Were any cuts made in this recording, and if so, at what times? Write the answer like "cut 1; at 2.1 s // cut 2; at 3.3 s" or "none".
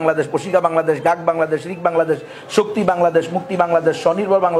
none